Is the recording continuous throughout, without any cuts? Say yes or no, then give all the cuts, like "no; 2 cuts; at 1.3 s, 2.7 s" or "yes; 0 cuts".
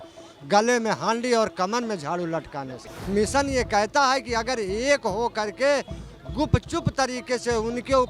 no; 1 cut; at 2.9 s